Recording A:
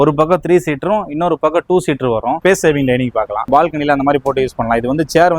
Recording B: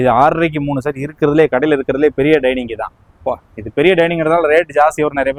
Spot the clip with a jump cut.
A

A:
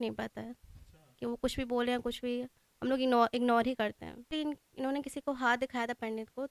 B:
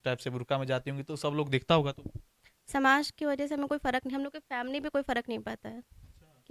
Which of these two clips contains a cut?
A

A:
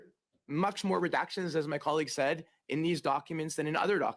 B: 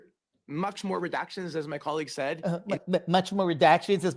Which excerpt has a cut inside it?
A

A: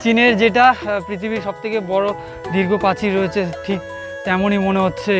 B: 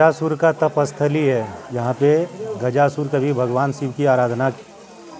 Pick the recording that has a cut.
B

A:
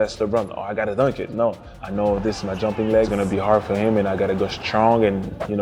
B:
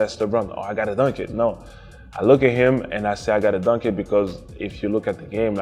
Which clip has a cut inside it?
A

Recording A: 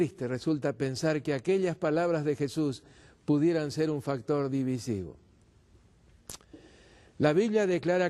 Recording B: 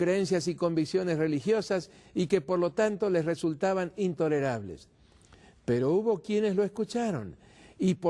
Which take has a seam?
B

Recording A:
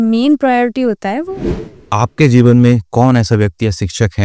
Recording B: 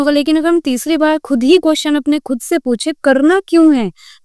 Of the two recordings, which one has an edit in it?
A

